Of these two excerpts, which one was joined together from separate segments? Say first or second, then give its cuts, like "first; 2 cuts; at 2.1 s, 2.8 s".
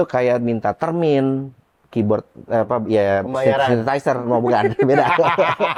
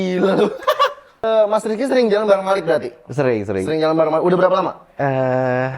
second; 1 cut; at 1.2 s